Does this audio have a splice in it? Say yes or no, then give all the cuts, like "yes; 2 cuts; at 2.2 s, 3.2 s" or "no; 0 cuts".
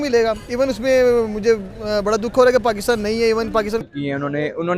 yes; 1 cut; at 3.9 s